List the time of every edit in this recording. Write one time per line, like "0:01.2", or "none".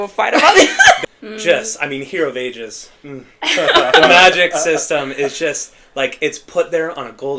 0:01.0